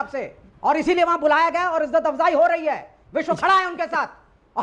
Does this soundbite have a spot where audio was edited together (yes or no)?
no